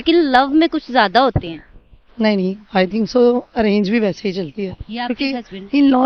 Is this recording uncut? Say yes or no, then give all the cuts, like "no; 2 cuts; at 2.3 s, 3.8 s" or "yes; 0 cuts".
yes; 0 cuts